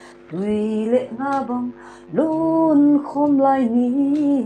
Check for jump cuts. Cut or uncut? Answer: uncut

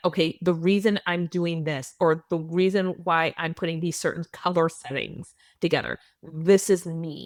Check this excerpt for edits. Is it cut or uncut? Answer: uncut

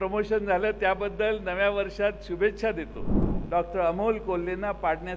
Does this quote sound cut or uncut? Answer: cut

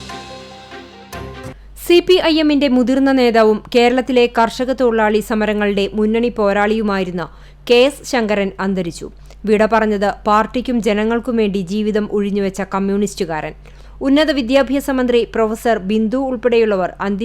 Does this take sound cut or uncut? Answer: cut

